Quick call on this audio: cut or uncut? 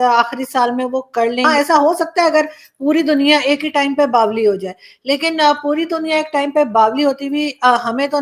cut